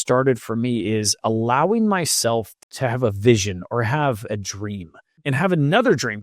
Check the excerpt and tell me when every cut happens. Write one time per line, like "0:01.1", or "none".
0:02.6
0:05.2